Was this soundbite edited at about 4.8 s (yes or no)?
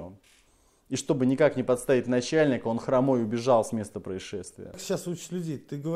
yes